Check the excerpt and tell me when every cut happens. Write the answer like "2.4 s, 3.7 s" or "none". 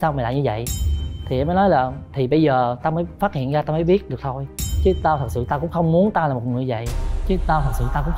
none